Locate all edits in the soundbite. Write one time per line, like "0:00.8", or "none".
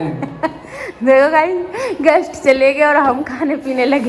none